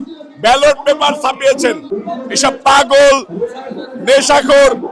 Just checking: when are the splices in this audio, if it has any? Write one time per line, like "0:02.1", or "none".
0:01.9